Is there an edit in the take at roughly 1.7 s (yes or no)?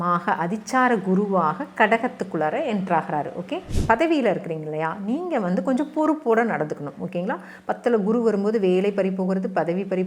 no